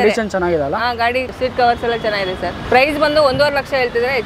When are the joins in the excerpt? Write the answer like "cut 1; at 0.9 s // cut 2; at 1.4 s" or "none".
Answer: none